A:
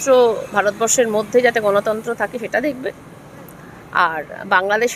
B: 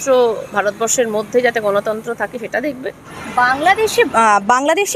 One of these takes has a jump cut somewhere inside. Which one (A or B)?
B